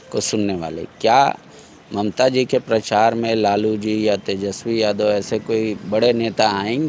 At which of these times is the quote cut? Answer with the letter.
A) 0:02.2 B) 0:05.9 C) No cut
C